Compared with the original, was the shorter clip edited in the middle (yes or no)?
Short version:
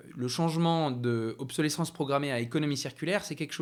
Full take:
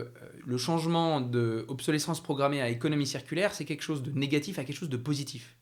no